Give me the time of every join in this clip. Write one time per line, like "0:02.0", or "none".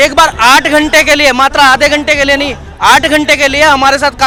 none

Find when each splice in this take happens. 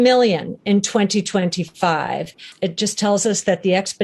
0:02.4

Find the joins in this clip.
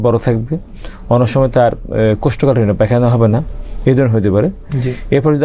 none

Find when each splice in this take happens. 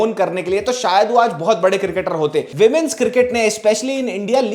0:02.5

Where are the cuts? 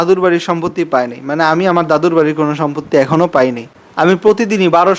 0:03.7

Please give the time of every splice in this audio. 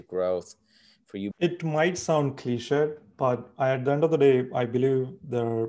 0:01.3

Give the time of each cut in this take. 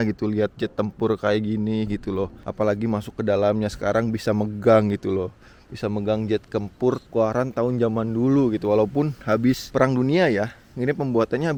none

